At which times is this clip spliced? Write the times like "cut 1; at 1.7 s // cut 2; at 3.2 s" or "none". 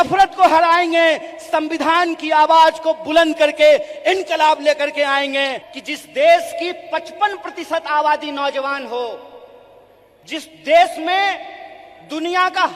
cut 1; at 5.6 s